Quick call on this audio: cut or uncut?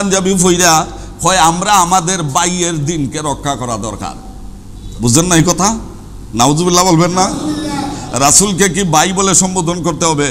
cut